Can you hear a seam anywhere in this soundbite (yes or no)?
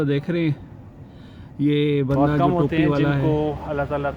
yes